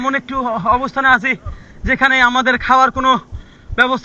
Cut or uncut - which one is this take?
uncut